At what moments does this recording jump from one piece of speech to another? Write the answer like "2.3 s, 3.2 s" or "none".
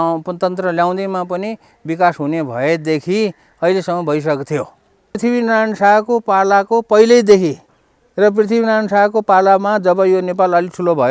5.2 s